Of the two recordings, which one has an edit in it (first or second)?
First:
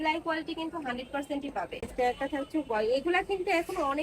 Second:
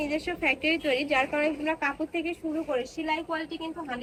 first